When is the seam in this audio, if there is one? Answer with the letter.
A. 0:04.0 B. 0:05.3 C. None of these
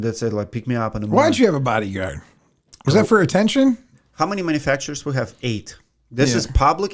A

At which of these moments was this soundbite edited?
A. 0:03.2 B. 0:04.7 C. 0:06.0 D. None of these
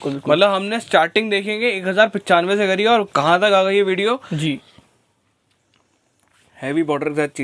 B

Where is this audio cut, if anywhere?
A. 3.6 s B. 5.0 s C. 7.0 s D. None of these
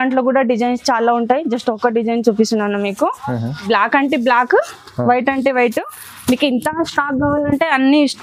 A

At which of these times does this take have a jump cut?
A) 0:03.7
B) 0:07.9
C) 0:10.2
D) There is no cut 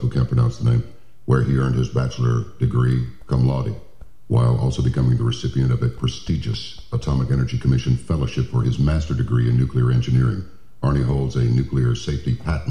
A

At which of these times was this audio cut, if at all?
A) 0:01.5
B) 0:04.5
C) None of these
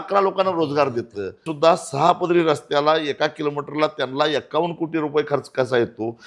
A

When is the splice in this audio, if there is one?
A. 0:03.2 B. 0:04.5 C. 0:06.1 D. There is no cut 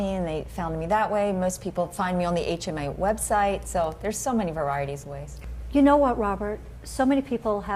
D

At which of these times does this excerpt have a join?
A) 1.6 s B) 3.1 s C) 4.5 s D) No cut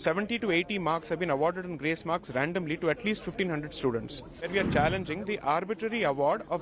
C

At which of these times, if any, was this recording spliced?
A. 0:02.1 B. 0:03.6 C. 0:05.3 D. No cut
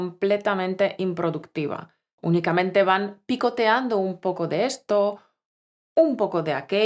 A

